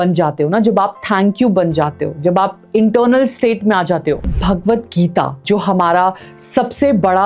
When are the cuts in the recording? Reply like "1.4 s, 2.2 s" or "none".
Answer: 4.3 s, 5.4 s